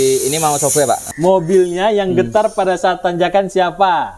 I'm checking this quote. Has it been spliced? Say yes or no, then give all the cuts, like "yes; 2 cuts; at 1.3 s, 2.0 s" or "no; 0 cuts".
yes; 1 cut; at 1.1 s